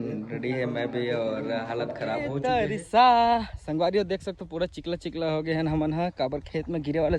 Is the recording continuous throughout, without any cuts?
no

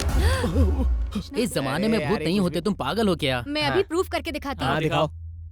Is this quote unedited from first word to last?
no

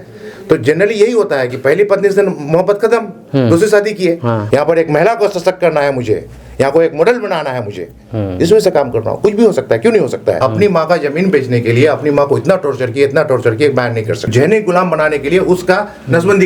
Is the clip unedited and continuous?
no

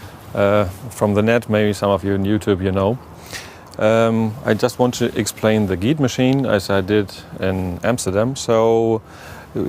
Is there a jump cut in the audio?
yes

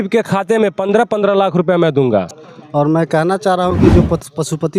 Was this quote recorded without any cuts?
no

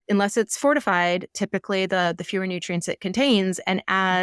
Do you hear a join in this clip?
no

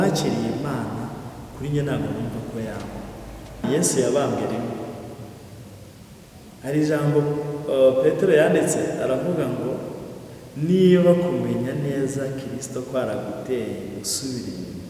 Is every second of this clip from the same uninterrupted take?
no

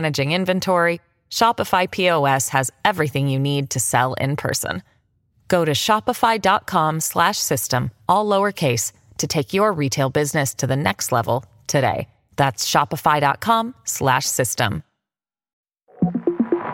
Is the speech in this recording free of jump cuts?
no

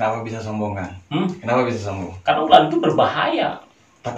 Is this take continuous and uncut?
yes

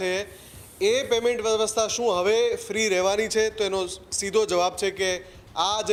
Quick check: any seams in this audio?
no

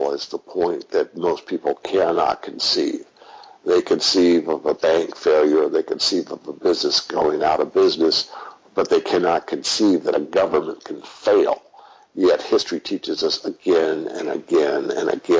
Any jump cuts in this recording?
no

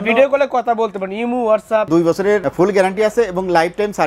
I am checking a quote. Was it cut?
yes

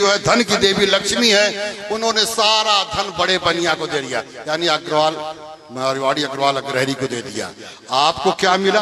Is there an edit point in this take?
no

